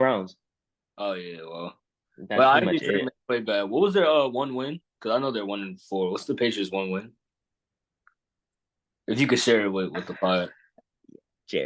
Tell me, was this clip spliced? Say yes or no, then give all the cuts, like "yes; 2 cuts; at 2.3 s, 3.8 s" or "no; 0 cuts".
no; 0 cuts